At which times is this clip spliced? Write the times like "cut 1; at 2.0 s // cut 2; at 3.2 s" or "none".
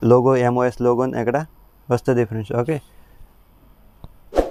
none